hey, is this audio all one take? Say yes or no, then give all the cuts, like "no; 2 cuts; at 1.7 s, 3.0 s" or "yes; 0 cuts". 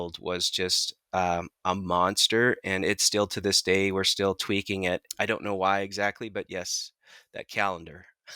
no; 1 cut; at 5.1 s